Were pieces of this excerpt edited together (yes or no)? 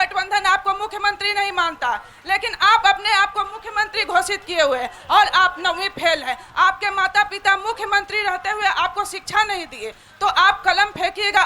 no